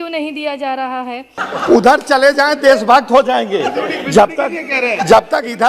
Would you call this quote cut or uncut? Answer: cut